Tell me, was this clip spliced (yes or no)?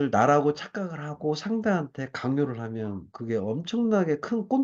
no